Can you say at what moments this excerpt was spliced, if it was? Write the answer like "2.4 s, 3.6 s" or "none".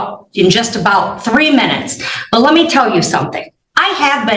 none